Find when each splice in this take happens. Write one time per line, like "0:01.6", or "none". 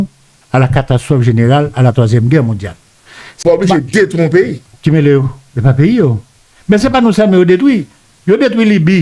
0:03.4

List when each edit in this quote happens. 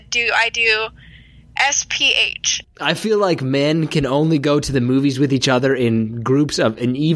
0:02.5

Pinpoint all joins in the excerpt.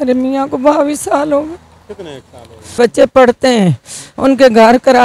0:02.8

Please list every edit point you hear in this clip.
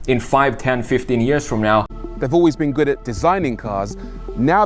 0:02.0

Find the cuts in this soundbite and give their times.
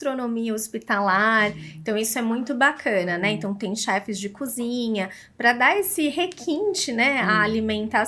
none

